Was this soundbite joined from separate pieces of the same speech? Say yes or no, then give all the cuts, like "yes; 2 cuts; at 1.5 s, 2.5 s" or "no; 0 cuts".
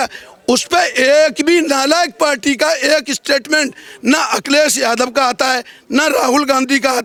no; 0 cuts